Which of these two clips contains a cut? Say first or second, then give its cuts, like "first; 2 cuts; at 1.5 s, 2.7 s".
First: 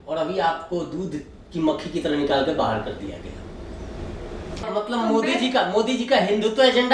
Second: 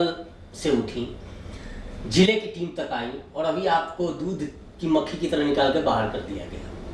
first; 1 cut; at 4.6 s